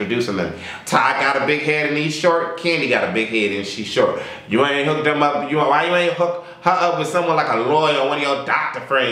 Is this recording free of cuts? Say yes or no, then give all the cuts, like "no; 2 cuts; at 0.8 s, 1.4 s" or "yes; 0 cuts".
yes; 0 cuts